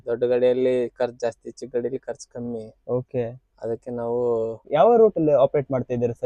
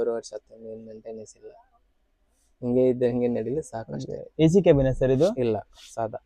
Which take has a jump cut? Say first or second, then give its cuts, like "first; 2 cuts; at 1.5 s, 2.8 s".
first; 1 cut; at 4.7 s